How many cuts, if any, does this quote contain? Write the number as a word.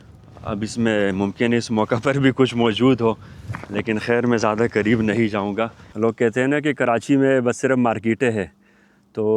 one